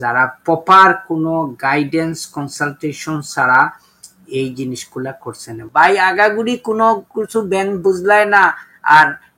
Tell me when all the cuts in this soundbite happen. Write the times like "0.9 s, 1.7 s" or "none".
5.6 s